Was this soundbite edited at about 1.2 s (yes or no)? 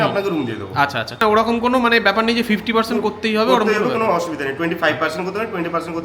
yes